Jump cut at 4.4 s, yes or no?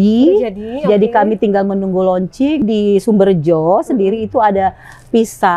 no